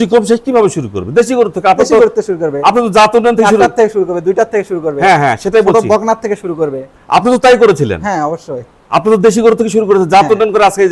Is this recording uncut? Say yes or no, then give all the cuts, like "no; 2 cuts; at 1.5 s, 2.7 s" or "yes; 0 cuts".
yes; 0 cuts